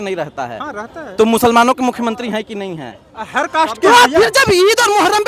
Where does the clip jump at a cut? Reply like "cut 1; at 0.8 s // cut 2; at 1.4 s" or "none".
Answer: none